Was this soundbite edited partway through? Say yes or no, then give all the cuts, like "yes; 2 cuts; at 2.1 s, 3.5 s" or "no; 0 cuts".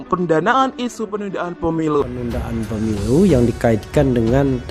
yes; 1 cut; at 2.0 s